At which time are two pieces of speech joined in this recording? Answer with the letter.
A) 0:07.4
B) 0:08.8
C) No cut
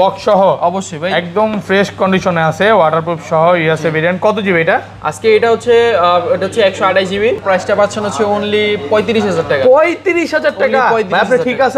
A